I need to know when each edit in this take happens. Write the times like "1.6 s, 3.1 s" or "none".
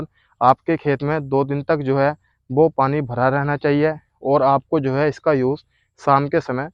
none